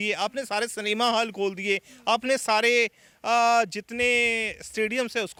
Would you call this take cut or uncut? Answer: uncut